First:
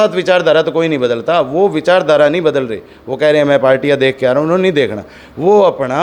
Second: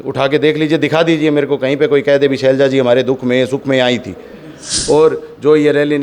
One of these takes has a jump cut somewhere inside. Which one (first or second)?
second